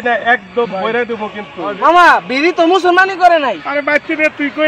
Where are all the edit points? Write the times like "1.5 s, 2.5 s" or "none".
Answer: none